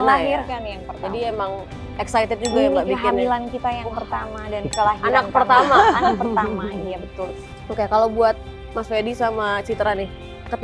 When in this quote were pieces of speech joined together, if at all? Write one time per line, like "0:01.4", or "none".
none

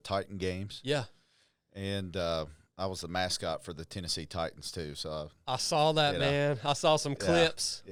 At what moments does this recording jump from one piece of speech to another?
none

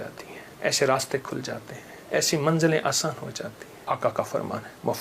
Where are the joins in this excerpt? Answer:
0:03.7

